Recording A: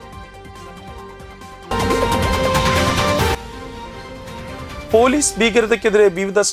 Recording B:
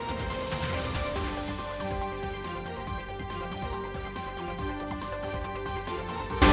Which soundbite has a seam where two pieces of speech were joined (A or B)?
A